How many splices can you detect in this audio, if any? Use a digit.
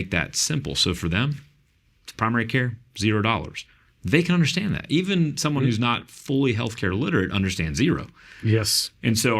0